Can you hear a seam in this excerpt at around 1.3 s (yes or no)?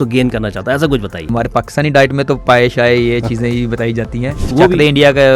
yes